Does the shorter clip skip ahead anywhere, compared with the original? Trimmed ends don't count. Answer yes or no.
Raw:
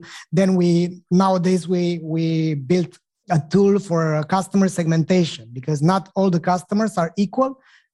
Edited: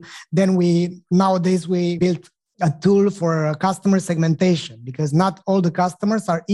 yes